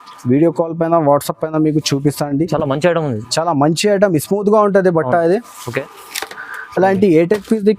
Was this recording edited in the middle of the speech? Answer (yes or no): yes